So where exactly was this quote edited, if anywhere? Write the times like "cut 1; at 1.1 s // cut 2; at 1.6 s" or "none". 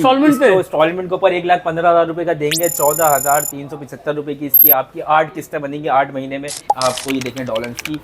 cut 1; at 6.6 s